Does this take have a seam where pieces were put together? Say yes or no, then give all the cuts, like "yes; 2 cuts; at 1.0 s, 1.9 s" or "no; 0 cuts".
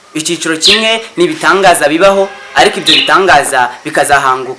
no; 0 cuts